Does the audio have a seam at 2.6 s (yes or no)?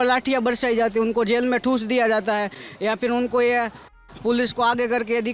no